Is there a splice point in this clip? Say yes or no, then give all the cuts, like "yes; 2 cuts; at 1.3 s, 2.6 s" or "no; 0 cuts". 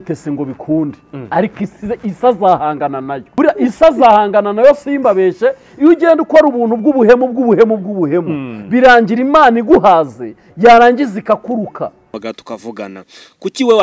yes; 1 cut; at 3.3 s